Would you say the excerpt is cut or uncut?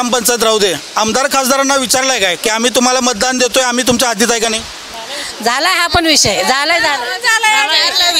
uncut